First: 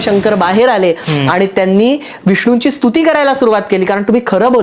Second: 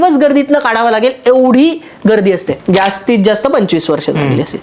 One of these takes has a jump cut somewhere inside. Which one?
second; 1 cut; at 2.5 s

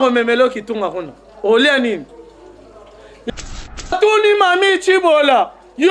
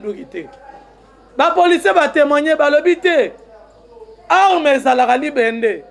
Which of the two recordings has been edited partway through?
first; 1 cut; at 3.3 s

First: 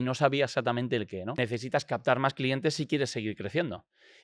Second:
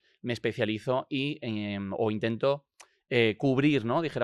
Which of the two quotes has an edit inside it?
first; 1 cut; at 1.3 s

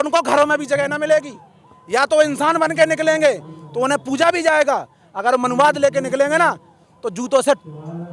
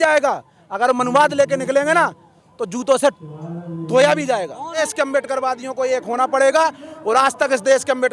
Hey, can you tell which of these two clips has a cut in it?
second; 1 cut; at 4.8 s

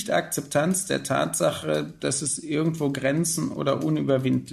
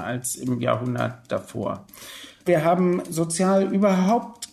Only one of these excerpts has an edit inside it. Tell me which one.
second; 1 cut; at 2.4 s

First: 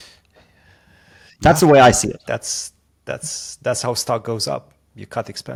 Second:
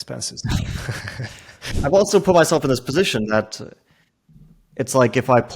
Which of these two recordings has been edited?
second; 1 cut; at 1.8 s

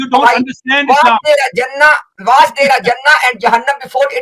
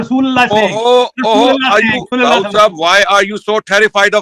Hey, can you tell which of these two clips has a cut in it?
second; 1 cut; at 2.1 s

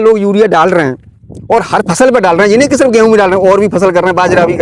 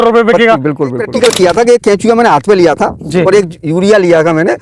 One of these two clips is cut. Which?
second; 1 cut; at 1.0 s

